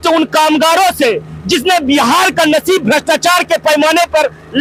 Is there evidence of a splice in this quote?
no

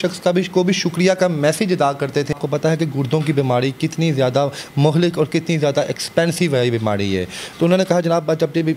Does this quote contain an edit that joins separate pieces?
yes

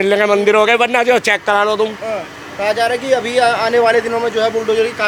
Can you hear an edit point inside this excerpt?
no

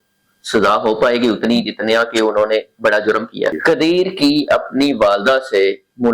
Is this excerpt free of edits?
no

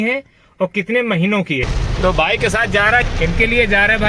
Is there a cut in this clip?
yes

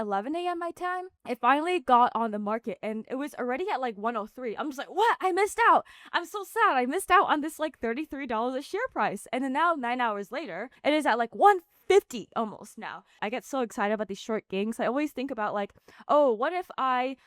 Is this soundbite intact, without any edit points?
no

